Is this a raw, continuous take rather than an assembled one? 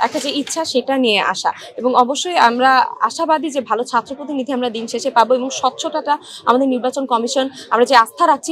yes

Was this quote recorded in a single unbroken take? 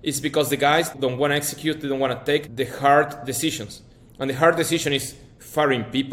no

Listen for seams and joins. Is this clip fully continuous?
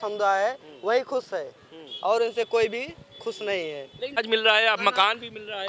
yes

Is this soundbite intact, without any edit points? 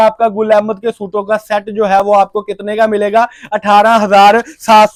yes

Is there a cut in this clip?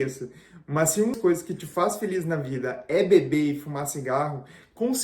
yes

